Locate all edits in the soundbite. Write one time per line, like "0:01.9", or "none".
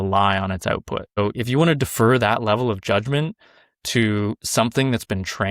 0:01.2